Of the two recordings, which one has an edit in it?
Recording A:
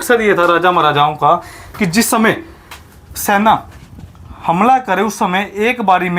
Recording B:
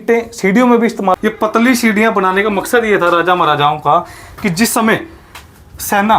B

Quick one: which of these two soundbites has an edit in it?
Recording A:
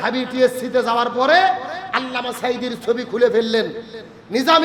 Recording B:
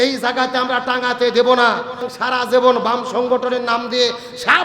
B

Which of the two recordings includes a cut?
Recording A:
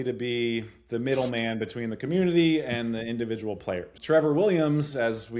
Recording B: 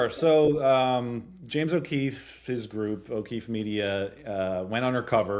A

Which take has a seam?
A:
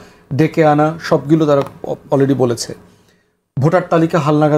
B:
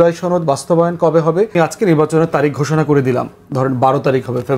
B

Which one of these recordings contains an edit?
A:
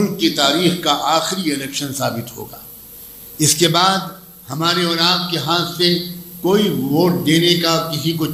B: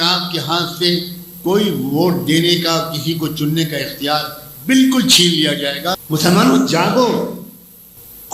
B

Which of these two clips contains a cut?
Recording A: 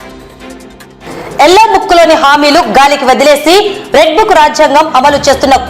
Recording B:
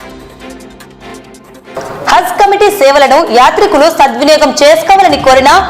A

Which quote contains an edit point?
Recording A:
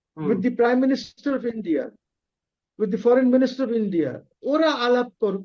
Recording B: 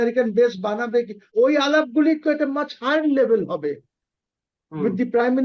B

